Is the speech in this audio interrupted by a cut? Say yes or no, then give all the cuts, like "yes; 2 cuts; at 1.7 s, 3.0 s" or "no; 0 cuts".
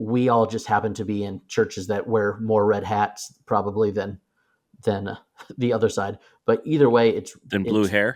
no; 0 cuts